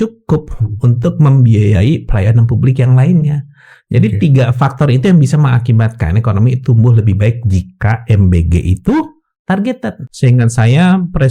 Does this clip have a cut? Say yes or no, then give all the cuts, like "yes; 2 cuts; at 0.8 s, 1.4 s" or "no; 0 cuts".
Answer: yes; 1 cut; at 10.0 s